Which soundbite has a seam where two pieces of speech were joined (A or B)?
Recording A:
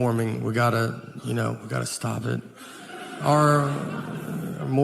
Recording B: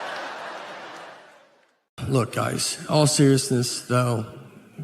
B